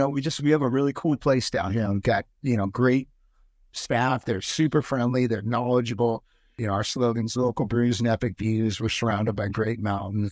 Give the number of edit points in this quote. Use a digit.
1